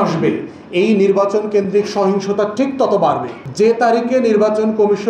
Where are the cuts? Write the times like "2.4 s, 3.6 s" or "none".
3.4 s